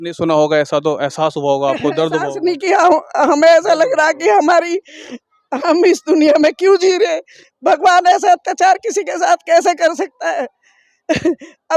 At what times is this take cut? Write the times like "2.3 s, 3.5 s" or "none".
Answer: none